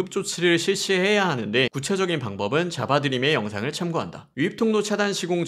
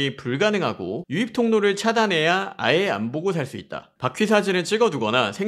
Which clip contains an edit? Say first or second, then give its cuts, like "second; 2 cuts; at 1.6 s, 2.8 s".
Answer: first; 2 cuts; at 1.8 s, 4.3 s